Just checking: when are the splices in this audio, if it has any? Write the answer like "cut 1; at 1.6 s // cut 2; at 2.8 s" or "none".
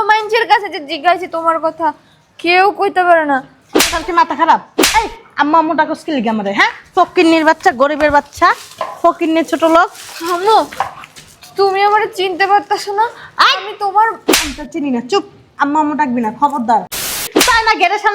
cut 1; at 17.2 s

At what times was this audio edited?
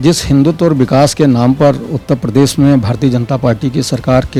none

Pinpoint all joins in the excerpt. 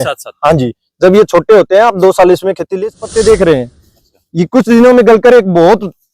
cut 1; at 2.8 s

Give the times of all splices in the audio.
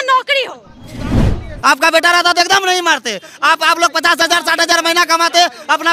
cut 1; at 1.1 s

